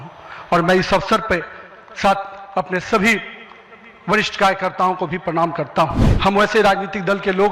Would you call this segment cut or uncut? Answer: cut